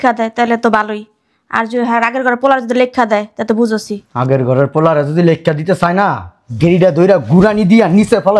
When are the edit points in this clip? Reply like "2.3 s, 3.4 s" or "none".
4.0 s